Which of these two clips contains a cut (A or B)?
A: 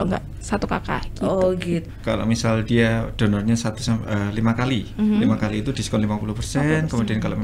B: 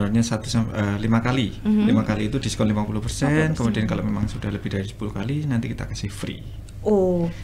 A